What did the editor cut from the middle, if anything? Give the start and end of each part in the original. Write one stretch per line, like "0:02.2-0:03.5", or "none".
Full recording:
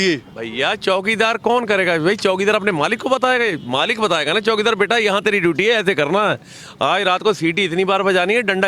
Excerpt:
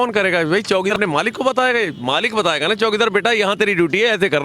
0:02.5-0:02.6